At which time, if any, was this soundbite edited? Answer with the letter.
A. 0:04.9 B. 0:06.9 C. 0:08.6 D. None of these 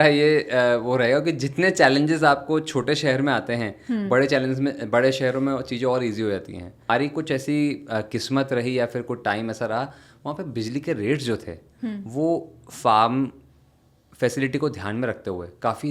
B